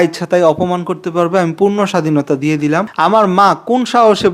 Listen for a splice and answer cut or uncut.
cut